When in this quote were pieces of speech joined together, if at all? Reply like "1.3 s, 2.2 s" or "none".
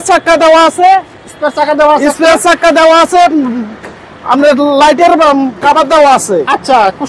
none

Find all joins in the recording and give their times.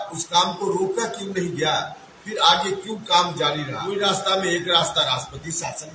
3.8 s

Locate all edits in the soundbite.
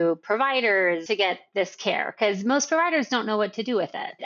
1.0 s

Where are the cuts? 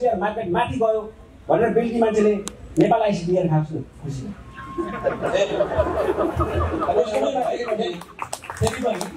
none

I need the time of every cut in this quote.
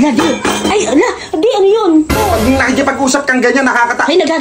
2.1 s

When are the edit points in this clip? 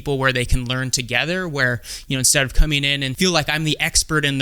3.1 s

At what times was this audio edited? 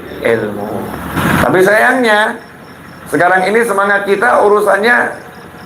1.0 s

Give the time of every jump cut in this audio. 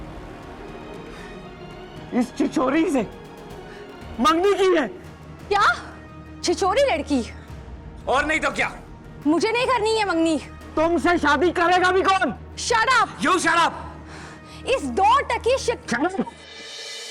none

